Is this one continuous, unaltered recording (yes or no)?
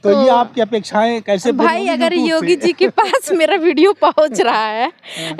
yes